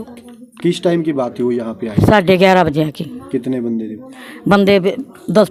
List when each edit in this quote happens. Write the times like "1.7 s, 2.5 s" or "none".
none